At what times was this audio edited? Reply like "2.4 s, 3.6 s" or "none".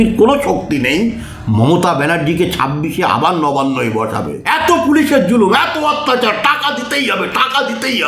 4.3 s